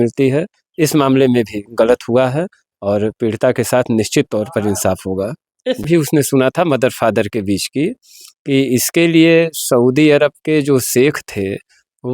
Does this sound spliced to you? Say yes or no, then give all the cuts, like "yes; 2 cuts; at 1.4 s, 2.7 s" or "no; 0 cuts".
yes; 1 cut; at 5.9 s